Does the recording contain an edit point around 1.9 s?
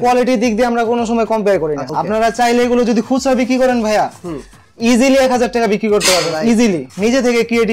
yes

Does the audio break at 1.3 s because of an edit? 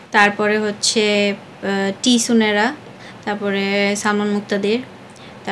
no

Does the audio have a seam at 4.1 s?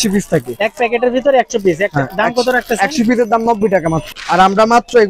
yes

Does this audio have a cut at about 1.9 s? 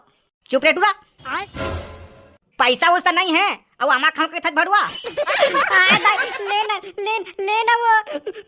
no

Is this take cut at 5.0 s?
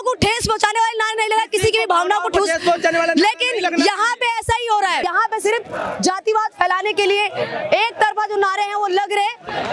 yes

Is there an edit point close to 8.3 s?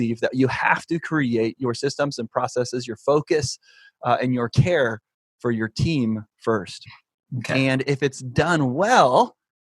no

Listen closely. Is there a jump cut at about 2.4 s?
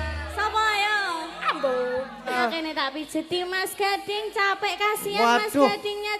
yes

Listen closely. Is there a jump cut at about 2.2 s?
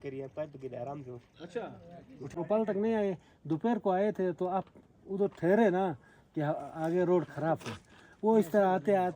yes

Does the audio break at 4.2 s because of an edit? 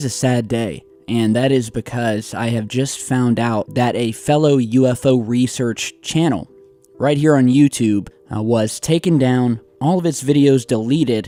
no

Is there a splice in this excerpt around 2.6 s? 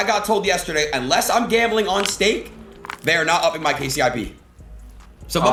no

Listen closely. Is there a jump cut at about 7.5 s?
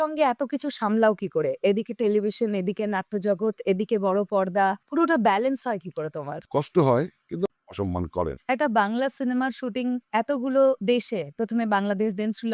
yes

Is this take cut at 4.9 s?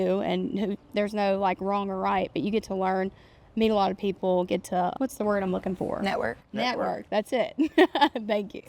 yes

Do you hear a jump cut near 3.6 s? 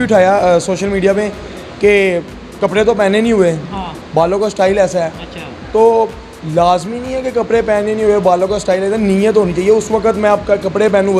no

